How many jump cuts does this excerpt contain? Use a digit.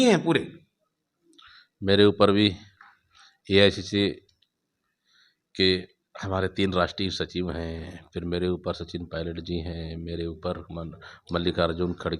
0